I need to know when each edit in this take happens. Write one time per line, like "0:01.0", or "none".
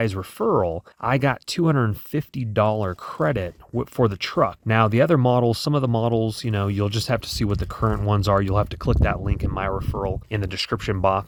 none